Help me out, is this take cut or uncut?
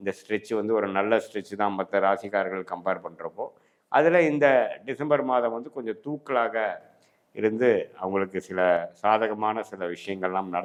uncut